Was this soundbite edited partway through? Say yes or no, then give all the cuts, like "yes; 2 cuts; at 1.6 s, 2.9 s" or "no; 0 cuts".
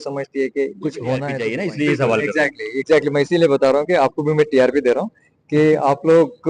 yes; 1 cut; at 1.5 s